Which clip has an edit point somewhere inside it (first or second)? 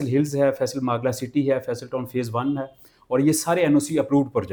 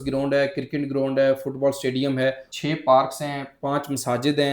second